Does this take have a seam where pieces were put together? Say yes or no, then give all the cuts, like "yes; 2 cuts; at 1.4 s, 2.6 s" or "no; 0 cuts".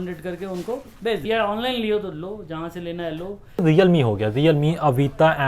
yes; 2 cuts; at 1.2 s, 3.6 s